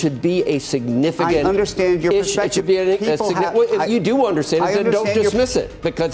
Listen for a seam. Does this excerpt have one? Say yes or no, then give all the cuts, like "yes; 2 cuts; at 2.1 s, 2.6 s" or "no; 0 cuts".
no; 0 cuts